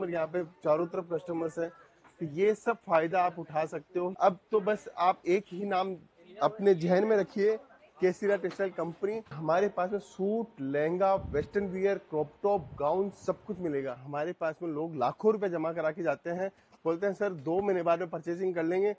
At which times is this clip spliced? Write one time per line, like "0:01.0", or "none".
0:04.1
0:09.3
0:14.1